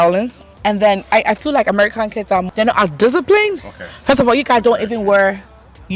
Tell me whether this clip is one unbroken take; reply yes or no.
yes